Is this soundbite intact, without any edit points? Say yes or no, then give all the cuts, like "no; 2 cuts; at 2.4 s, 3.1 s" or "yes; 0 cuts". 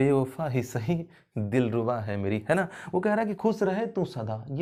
yes; 0 cuts